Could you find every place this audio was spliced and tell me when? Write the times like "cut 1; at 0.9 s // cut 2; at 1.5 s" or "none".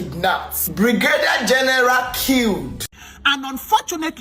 cut 1; at 2.7 s